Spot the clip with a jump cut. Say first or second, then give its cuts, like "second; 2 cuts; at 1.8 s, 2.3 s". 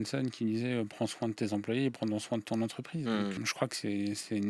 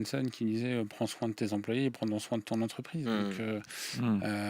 first; 1 cut; at 3.4 s